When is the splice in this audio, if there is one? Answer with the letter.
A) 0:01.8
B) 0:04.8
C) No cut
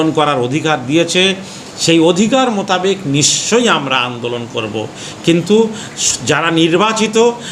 C